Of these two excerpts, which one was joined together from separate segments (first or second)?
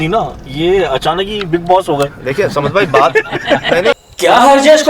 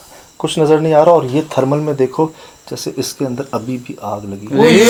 first